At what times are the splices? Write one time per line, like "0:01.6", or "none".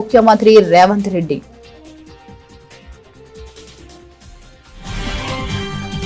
0:01.7